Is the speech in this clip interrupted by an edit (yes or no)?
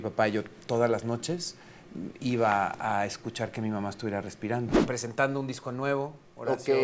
yes